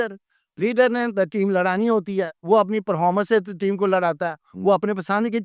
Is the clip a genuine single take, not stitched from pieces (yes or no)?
yes